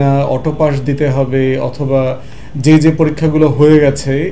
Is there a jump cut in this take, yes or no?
no